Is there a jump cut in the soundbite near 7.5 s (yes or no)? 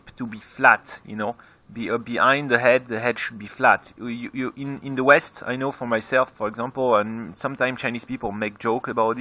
yes